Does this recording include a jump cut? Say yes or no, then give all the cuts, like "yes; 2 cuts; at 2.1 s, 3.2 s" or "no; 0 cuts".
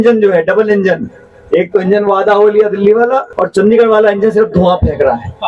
yes; 1 cut; at 3.3 s